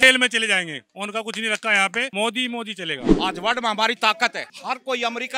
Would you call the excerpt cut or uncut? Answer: cut